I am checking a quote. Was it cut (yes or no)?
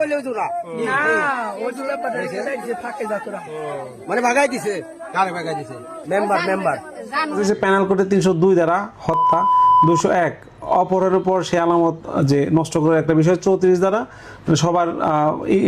yes